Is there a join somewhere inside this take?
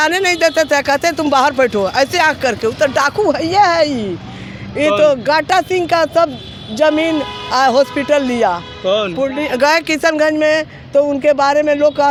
no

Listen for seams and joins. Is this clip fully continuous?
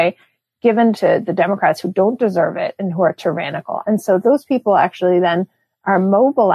no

